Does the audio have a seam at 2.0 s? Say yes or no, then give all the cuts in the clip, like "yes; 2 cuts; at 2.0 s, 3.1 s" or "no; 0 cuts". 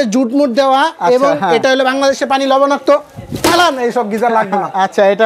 no; 0 cuts